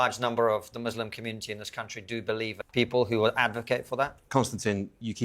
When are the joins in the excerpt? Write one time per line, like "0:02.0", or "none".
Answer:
0:02.5